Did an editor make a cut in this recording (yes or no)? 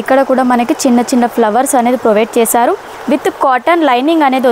no